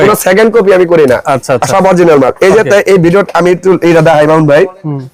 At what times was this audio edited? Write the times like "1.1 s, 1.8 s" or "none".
none